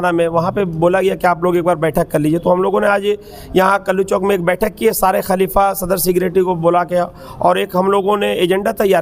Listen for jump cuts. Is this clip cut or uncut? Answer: uncut